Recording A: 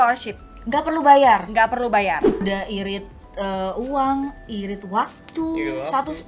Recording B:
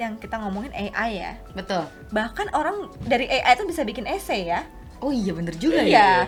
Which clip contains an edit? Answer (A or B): A